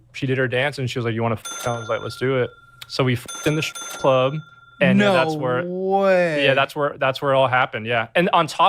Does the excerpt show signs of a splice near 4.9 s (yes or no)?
no